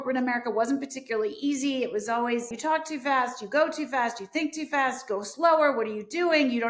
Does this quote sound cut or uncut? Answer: cut